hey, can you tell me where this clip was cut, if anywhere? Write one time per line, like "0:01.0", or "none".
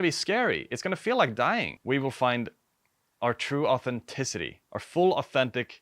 0:01.7